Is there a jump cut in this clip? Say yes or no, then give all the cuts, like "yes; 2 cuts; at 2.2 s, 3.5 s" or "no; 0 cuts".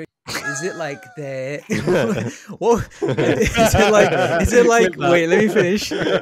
no; 0 cuts